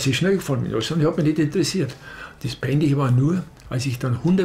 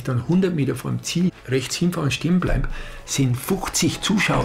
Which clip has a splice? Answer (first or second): second